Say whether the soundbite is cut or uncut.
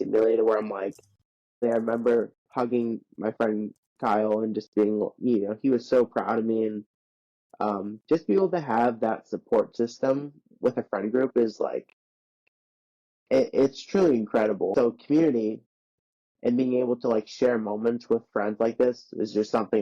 cut